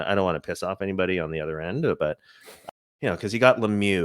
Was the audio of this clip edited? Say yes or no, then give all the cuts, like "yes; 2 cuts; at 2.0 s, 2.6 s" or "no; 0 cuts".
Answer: yes; 1 cut; at 2.5 s